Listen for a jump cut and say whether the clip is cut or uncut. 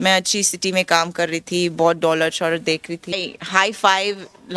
cut